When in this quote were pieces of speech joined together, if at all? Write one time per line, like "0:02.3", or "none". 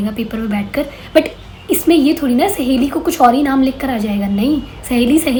none